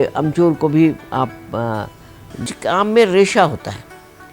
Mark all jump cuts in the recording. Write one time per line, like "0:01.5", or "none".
0:02.4